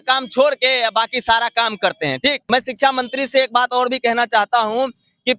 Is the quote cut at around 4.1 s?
no; 1 cut; at 2.4 s

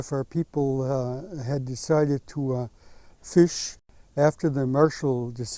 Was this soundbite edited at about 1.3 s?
no; 1 cut; at 3.8 s

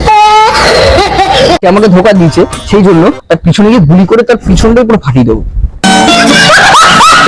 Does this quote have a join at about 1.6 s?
yes; 1 cut; at 1.6 s

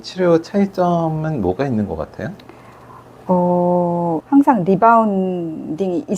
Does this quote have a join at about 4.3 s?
yes; 1 cut; at 4.3 s

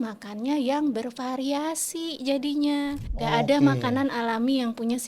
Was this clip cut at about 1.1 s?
no; 1 cut; at 3.1 s

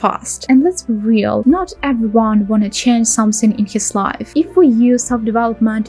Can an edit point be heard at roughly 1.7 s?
no; 1 cut; at 4.3 s

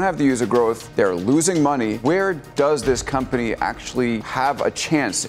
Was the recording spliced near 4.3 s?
yes; 3 cuts; at 0.8 s, 2.0 s, 4.3 s

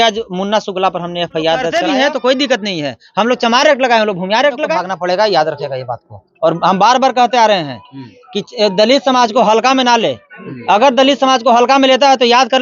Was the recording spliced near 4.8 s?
yes; 2 cuts; at 1.7 s, 4.8 s

